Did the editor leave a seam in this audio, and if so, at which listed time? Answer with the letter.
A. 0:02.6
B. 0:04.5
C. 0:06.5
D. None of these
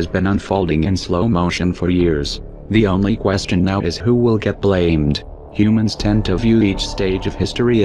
D